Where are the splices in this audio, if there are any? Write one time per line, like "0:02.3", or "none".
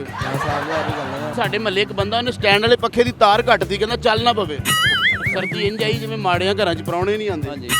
0:01.3
0:05.2

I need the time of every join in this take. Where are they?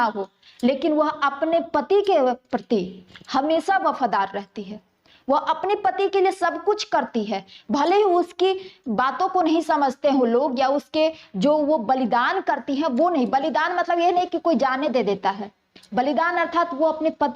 none

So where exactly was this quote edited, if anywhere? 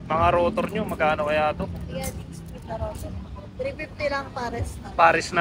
none

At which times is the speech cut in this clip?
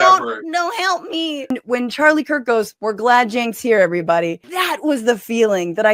0:01.5
0:02.7
0:04.5

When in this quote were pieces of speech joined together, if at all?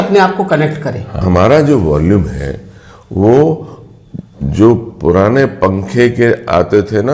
0:01.2

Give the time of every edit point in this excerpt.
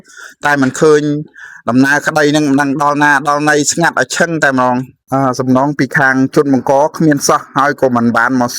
0:05.0

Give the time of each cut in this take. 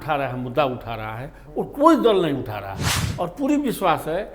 0:03.0

